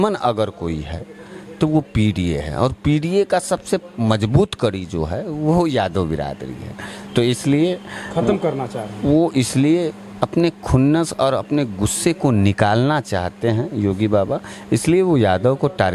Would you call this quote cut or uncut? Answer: uncut